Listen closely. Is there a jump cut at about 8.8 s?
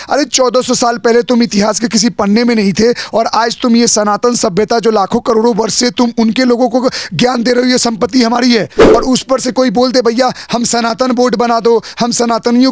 yes; 1 cut; at 8.8 s

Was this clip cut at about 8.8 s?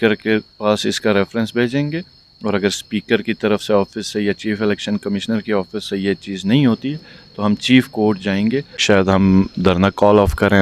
yes; 1 cut; at 8.8 s

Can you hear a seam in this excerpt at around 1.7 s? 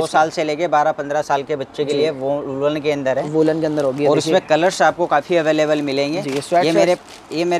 no; 0 cuts

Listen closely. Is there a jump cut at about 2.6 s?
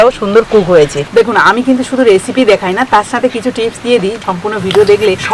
no; 2 cuts; at 1.0 s, 4.2 s

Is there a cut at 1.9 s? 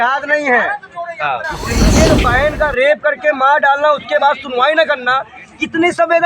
yes; 1 cut; at 1.9 s

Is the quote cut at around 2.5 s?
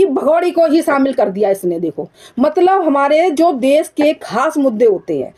no; 0 cuts

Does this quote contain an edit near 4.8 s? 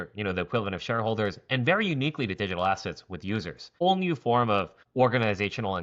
yes; 2 cuts; at 3.8 s, 4.8 s

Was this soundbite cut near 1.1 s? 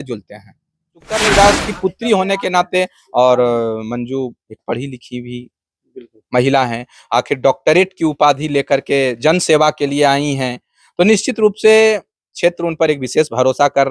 yes; 1 cut; at 1.1 s

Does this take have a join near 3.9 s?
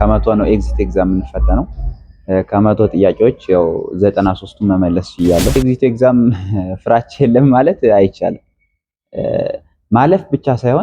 no; 1 cut; at 5.6 s

